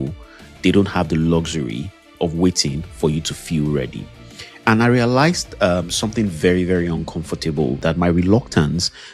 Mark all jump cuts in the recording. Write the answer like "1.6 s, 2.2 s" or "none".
2.1 s, 7.8 s